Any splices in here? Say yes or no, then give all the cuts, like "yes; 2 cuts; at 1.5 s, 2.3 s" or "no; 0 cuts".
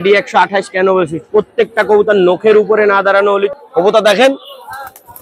yes; 1 cut; at 3.5 s